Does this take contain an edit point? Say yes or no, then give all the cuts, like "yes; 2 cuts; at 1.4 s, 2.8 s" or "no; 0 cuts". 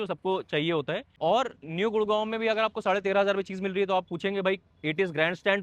yes; 1 cut; at 1.1 s